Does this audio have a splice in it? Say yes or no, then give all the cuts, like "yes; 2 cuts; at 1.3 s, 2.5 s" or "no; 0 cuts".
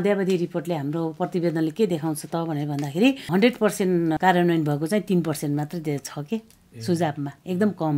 yes; 2 cuts; at 3.3 s, 4.2 s